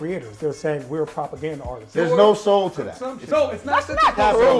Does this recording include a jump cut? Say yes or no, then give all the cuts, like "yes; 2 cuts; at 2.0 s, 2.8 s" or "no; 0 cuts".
yes; 2 cuts; at 1.9 s, 3.3 s